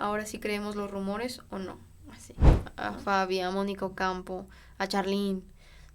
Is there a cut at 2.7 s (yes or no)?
yes